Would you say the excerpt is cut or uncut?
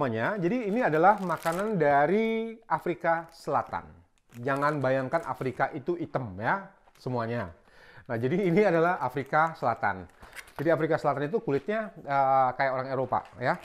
uncut